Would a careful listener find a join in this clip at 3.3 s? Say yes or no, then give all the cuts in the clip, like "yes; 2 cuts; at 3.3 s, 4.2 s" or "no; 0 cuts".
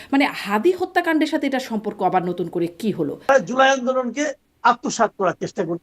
yes; 1 cut; at 3.3 s